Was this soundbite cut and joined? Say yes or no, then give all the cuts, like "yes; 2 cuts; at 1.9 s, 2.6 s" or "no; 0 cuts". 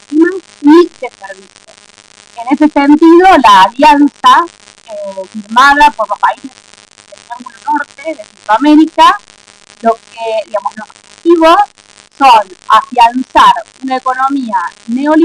no; 0 cuts